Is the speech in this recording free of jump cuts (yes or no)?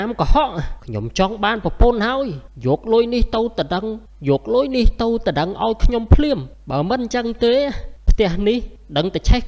yes